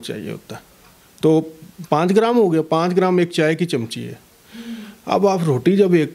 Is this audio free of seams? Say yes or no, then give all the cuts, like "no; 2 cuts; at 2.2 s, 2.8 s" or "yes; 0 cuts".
yes; 0 cuts